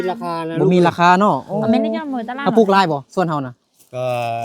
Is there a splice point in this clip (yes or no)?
no